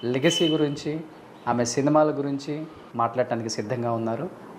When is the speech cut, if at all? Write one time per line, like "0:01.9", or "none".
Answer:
0:02.8